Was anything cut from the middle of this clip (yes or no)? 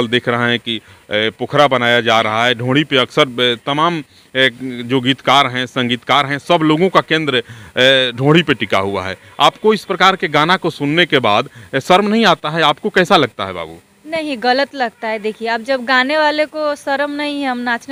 no